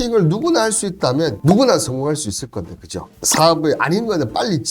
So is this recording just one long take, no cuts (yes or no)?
no